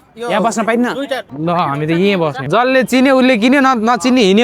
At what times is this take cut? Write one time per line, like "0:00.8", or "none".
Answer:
0:02.4